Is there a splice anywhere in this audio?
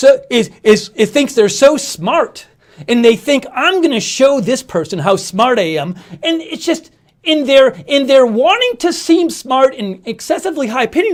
no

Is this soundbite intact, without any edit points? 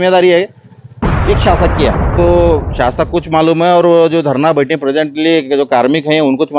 no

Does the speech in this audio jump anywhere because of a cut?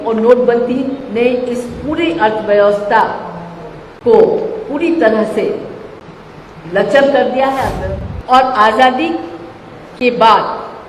yes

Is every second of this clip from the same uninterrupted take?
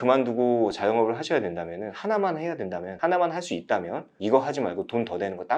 yes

